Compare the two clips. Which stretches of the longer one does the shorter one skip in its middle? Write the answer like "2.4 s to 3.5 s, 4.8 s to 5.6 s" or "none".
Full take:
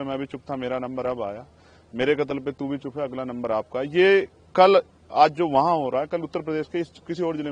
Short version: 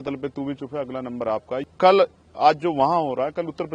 3.8 s to 4.4 s